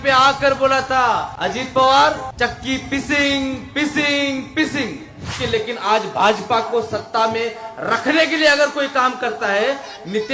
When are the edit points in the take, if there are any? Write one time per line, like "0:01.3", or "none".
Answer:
0:01.3
0:02.3
0:05.4